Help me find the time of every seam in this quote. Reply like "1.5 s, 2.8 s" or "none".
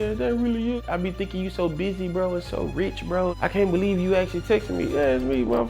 0.8 s, 3.4 s, 4.9 s